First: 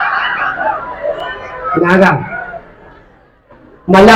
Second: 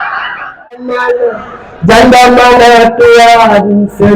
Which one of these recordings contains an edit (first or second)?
second